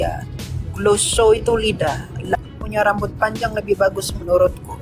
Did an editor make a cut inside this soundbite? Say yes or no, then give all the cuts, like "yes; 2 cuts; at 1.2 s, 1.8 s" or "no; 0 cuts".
yes; 1 cut; at 2.3 s